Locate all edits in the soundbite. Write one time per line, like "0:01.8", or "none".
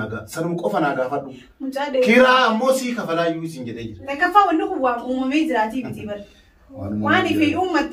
0:03.9